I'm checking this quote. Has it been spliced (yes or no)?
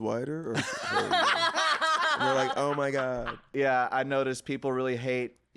yes